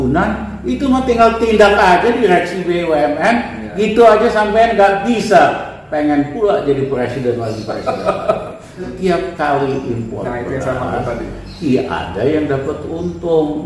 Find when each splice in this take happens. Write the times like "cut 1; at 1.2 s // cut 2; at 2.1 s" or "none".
cut 1; at 8.7 s